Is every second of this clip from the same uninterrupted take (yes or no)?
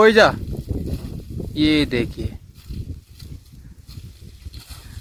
yes